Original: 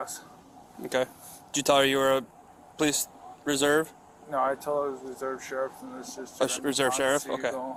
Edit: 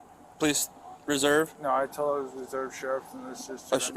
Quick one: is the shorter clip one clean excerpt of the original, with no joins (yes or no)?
no